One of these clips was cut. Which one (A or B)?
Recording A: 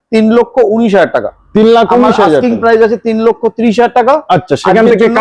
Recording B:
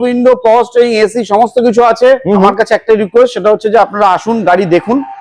B